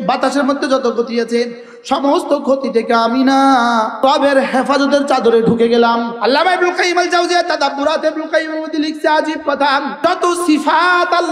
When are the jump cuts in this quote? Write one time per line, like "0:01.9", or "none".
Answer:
0:04.0
0:06.1
0:09.9

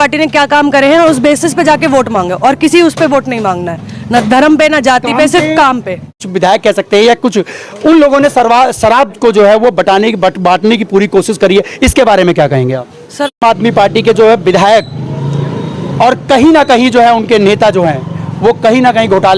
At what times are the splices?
0:06.3
0:13.4

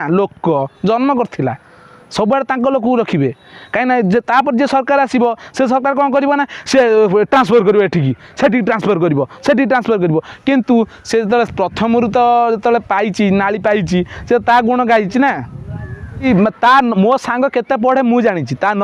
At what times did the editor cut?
0:16.2

